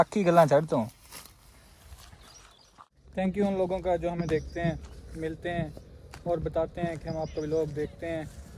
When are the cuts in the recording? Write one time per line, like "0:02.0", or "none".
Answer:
0:02.7